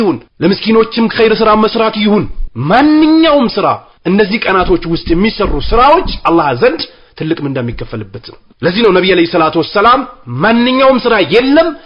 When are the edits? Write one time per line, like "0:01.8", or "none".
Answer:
none